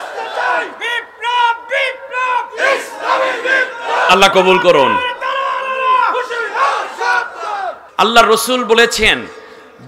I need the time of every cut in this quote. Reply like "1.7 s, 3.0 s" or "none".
7.8 s